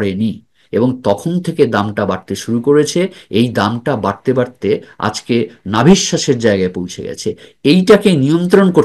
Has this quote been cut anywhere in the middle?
no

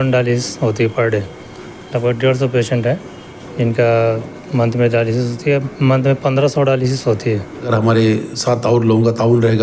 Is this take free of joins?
no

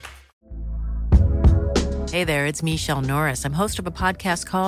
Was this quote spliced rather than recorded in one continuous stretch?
no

